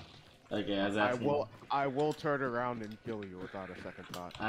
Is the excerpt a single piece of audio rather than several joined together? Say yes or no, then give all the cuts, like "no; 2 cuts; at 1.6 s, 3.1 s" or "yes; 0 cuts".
yes; 0 cuts